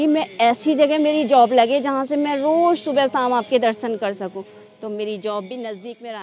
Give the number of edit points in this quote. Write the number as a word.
zero